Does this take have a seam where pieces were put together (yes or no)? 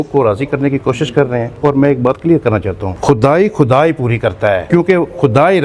yes